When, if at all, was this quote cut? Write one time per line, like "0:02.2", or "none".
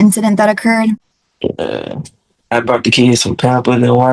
0:01.2